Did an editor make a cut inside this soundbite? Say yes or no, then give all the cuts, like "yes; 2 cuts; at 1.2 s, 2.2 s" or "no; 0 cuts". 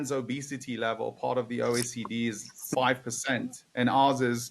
yes; 1 cut; at 2.7 s